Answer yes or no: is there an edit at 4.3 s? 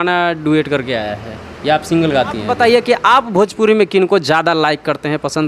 no